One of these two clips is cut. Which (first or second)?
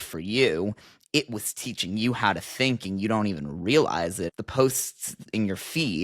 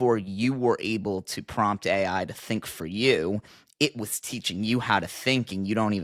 first